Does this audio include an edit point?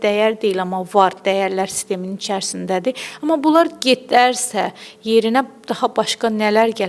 no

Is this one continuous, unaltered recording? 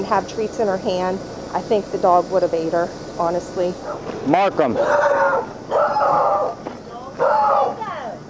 no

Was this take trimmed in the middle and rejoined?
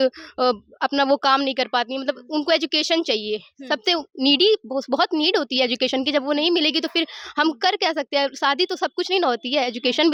no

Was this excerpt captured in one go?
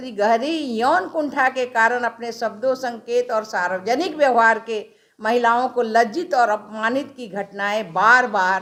yes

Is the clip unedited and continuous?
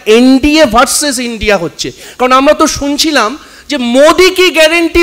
yes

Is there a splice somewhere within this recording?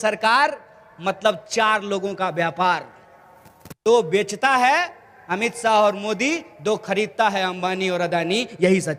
no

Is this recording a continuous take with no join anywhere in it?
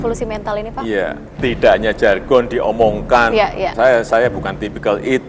no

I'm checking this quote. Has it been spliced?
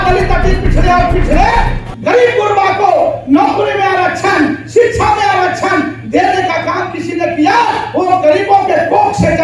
no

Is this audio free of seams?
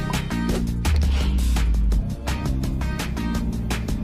yes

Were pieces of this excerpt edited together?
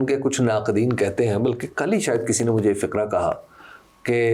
no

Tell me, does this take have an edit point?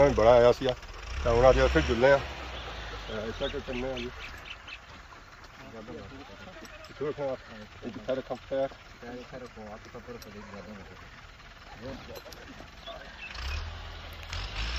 no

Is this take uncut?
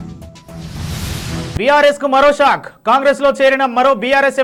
yes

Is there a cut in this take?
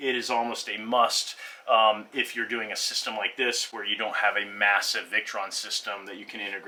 no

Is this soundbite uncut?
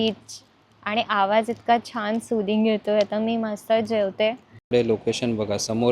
no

